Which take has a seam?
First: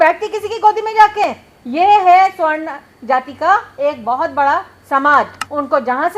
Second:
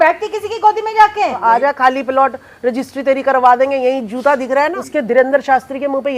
second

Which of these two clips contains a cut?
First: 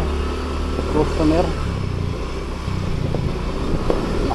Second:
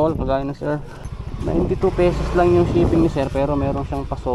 second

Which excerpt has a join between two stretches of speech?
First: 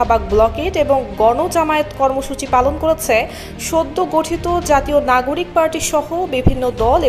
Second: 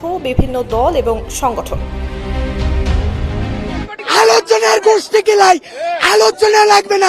second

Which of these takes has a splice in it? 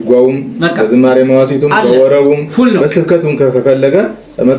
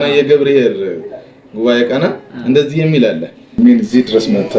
second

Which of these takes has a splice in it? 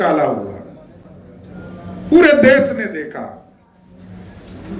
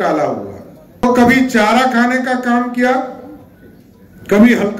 second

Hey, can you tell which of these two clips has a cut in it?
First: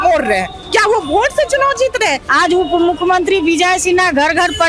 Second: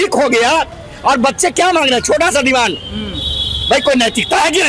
first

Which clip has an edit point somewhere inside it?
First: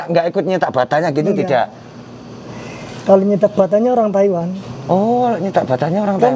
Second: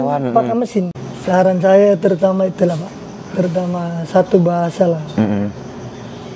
second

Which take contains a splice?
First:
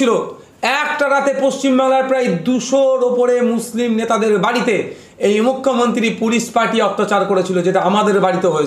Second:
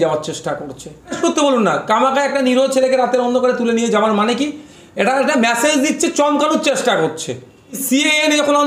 second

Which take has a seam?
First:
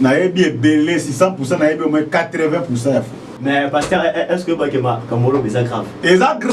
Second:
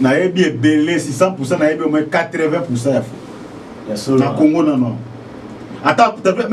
first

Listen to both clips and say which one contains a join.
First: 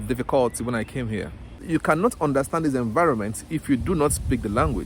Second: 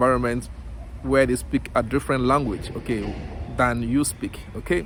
first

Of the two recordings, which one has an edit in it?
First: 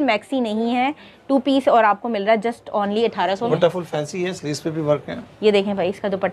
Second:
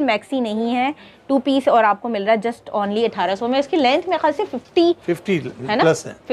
first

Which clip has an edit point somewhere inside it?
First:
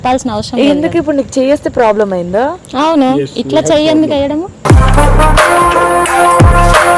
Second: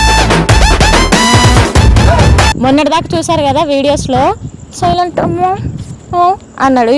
second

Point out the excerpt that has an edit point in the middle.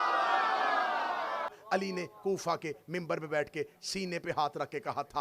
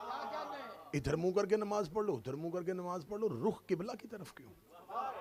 first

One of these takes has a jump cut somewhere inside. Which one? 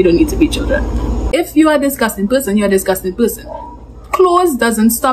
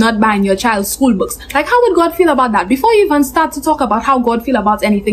first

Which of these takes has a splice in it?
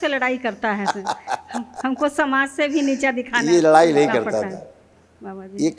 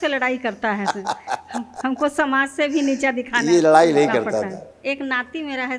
second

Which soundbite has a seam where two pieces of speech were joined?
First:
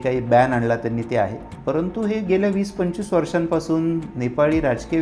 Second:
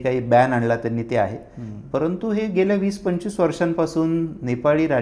first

